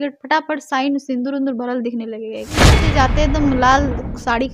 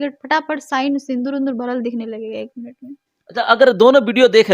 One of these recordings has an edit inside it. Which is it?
first; 1 cut; at 2.7 s

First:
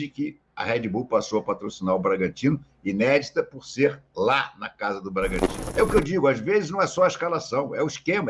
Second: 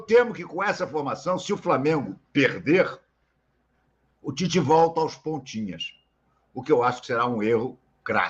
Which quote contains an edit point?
first; 1 cut; at 5.6 s

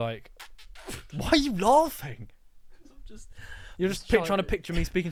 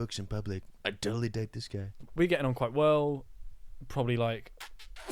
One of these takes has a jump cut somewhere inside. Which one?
second; 1 cut; at 2.1 s

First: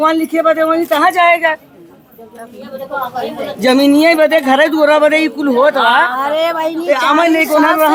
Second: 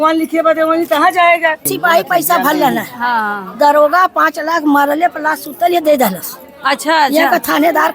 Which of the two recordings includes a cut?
second; 1 cut; at 1.7 s

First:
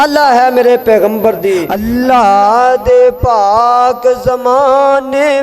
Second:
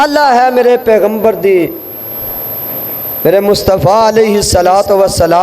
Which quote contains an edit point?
first; 1 cut; at 1.7 s

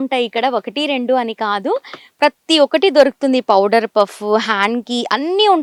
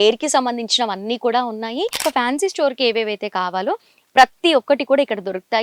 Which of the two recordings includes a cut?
second; 1 cut; at 2.0 s

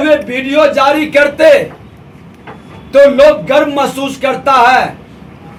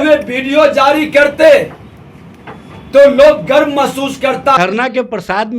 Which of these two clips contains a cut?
second; 1 cut; at 4.6 s

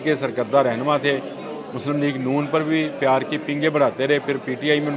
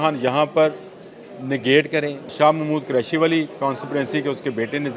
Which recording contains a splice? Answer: second; 1 cut; at 2.3 s

